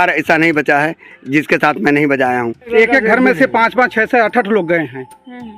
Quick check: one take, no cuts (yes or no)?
no